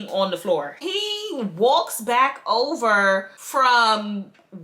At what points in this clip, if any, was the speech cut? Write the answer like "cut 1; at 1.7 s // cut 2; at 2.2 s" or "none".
cut 1; at 0.8 s // cut 2; at 3.4 s